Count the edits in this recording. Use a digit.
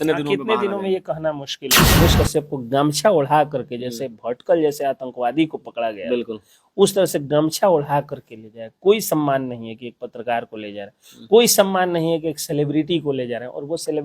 1